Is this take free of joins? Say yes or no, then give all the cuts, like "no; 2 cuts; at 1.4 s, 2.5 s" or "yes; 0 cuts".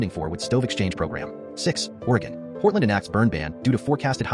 no; 1 cut; at 1.4 s